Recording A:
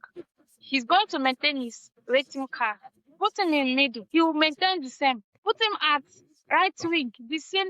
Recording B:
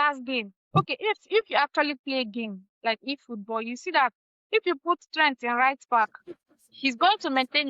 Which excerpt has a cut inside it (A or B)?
A